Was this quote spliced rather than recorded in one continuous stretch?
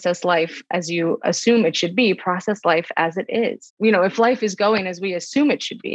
yes; 2 cuts; at 1.2 s, 3.6 s

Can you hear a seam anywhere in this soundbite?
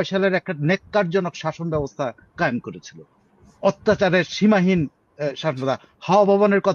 no; 0 cuts

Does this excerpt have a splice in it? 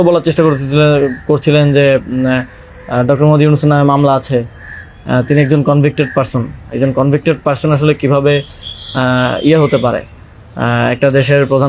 no; 0 cuts

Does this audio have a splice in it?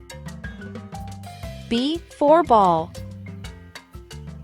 no; 0 cuts

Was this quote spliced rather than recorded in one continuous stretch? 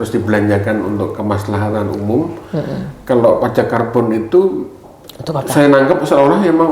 no; 0 cuts

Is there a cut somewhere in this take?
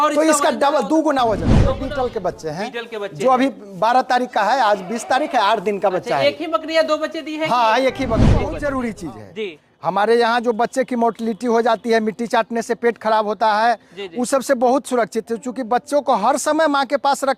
yes; 2 cuts; at 1.8 s, 8.5 s

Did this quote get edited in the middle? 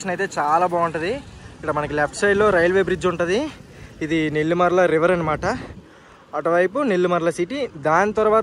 no; 0 cuts

